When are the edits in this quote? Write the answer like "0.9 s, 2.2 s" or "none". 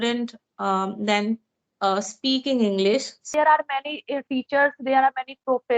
3.3 s